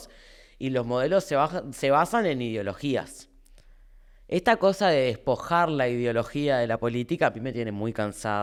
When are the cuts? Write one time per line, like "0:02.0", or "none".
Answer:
none